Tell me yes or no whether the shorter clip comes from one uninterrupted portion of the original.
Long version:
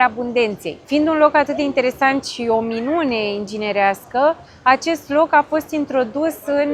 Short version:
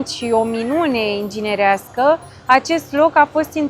yes